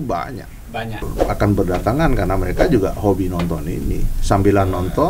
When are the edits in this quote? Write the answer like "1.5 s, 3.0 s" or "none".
1.1 s